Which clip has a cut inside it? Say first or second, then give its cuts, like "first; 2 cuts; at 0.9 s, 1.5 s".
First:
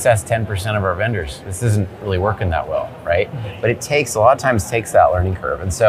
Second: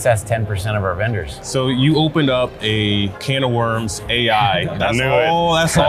second; 2 cuts; at 1.3 s, 3.2 s